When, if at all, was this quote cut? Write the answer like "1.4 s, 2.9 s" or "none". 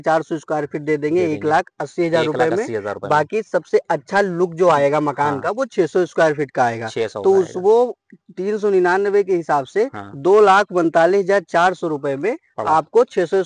none